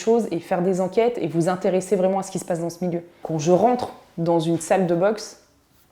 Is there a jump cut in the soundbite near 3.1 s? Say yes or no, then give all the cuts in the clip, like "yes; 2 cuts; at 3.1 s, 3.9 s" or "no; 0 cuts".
yes; 1 cut; at 3.1 s